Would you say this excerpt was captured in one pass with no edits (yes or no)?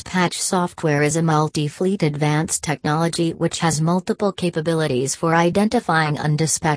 yes